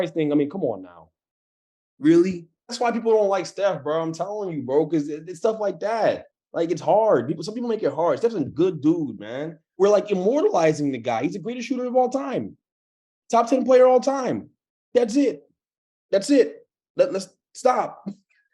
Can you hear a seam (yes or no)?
yes